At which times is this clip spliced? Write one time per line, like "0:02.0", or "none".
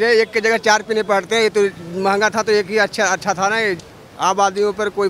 0:03.8